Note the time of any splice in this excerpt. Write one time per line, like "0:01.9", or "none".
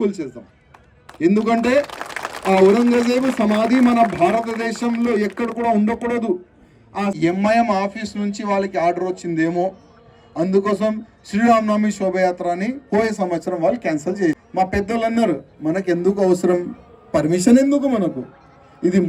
0:07.1
0:14.4